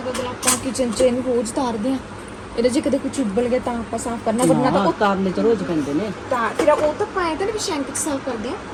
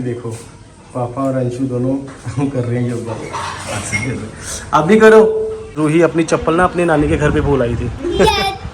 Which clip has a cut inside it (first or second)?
second